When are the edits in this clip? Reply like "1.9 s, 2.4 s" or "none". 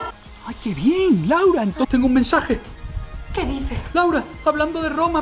1.9 s, 3.8 s